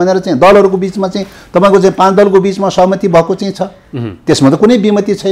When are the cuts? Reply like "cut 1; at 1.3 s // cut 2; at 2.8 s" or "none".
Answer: none